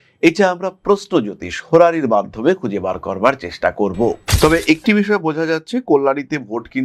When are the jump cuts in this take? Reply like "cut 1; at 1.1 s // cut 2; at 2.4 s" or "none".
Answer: cut 1; at 4.2 s